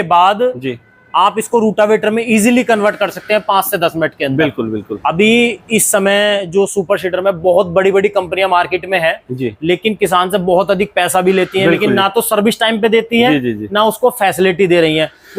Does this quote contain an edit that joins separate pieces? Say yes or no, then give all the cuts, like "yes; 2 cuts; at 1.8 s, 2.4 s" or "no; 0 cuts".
no; 0 cuts